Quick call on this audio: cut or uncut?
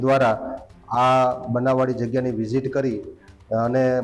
uncut